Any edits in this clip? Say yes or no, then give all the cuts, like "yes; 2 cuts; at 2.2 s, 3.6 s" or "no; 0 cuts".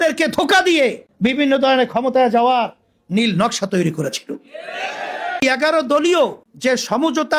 yes; 3 cuts; at 1.1 s, 5.4 s, 6.5 s